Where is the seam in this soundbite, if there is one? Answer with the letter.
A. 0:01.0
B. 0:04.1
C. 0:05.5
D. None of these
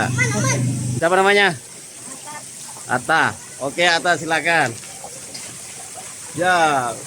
A